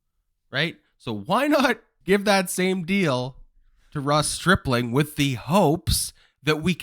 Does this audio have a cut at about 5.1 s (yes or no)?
no